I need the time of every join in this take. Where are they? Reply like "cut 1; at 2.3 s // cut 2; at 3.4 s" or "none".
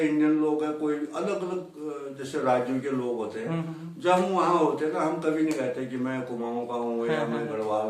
none